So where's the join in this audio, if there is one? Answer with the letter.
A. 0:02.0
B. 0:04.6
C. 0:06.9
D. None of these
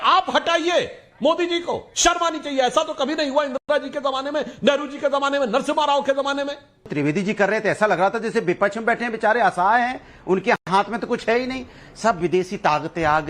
C